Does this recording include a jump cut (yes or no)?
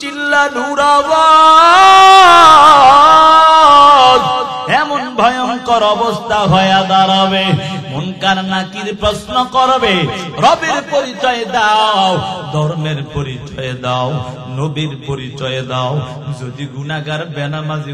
yes